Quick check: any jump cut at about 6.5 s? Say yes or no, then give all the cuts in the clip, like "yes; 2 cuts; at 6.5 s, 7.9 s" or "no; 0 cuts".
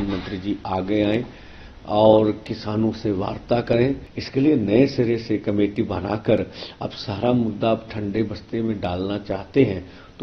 no; 1 cut; at 4.1 s